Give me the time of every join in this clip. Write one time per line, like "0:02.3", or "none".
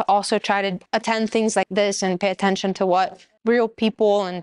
0:00.8
0:01.7
0:03.3